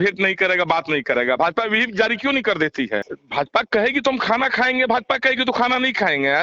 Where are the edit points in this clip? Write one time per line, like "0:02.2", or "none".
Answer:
0:03.2